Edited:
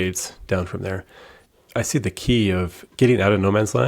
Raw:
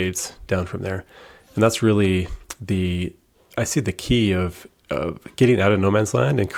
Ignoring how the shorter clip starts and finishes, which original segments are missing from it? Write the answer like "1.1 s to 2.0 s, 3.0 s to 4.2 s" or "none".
1.4 s to 3.2 s, 4.6 s to 5.2 s